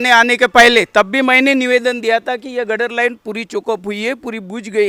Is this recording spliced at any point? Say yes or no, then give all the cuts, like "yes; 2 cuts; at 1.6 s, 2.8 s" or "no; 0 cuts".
no; 0 cuts